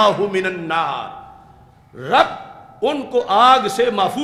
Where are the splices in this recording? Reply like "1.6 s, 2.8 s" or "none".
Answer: none